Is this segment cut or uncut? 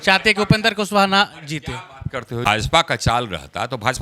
cut